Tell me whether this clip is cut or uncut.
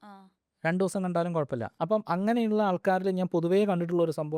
cut